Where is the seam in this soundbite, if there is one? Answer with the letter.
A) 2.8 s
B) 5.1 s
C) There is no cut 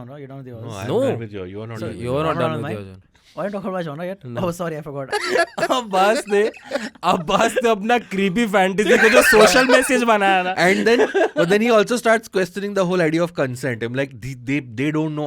B